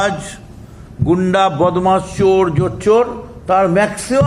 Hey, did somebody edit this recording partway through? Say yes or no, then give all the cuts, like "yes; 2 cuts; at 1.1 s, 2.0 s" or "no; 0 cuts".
no; 0 cuts